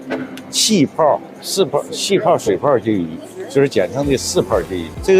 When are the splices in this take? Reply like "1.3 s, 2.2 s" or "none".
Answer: none